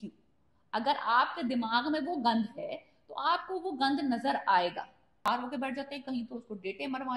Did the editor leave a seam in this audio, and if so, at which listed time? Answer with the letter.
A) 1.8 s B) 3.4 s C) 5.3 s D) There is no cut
C